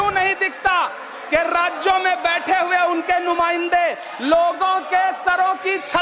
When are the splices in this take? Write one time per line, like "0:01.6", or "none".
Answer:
none